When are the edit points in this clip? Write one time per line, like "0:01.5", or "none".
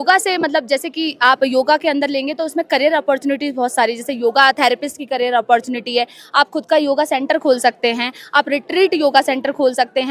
none